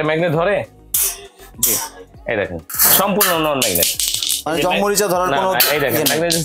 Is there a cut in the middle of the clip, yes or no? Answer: yes